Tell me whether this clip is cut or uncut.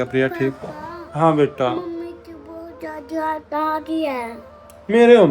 uncut